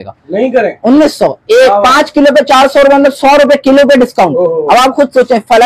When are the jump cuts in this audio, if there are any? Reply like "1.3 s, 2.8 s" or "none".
none